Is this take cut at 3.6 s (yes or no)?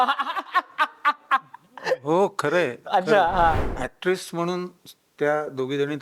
yes